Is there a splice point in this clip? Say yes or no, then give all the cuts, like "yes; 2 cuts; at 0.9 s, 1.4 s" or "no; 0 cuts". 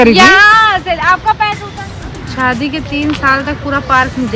yes; 1 cut; at 1.8 s